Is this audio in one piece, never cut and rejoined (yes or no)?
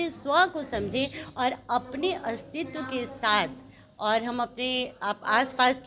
yes